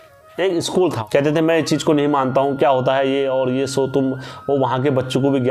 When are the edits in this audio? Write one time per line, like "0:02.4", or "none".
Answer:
0:01.0